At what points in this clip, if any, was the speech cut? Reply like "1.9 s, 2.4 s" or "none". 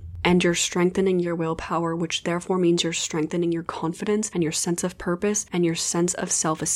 4.3 s, 5.4 s